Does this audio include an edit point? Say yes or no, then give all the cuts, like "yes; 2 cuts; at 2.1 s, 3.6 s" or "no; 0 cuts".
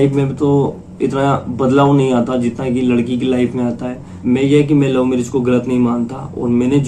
yes; 1 cut; at 4.2 s